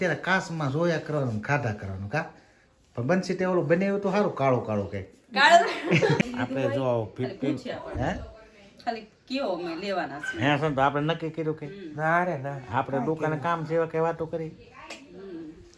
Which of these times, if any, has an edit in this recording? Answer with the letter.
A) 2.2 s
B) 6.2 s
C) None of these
B